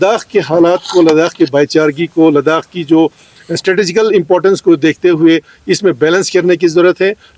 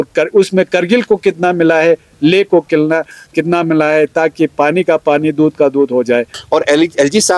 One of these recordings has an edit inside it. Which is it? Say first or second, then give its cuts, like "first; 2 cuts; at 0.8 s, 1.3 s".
second; 1 cut; at 6.4 s